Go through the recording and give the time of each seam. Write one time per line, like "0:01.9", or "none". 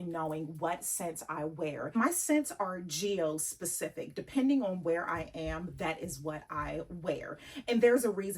0:01.9